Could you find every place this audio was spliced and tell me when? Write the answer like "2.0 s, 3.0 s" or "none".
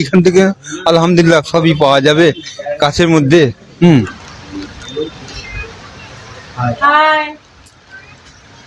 3.9 s